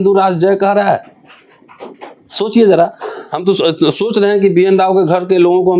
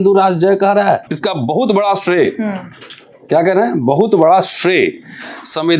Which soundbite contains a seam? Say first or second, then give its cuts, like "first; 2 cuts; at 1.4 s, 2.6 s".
second; 1 cut; at 1.1 s